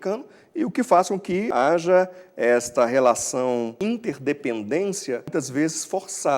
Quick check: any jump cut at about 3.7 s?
yes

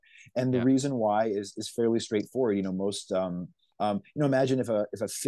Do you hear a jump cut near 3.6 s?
yes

